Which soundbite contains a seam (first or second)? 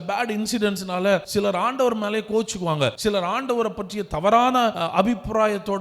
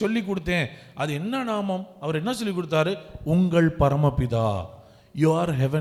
first